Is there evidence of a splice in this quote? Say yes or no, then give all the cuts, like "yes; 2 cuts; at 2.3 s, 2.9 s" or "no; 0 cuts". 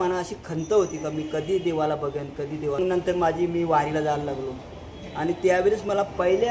yes; 1 cut; at 2.8 s